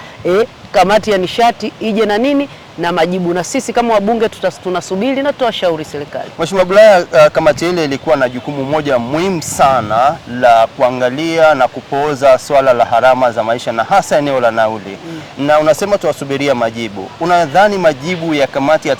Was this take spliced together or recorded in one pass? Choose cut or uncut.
uncut